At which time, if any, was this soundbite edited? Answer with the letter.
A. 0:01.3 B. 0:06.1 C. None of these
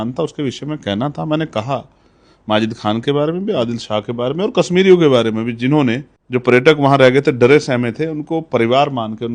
B